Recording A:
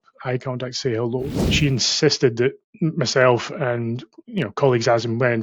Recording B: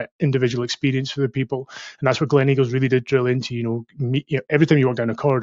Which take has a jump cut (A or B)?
A